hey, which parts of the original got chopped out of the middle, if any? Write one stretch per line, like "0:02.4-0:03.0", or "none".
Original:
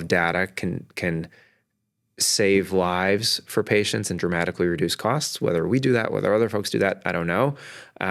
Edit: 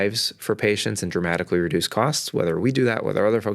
none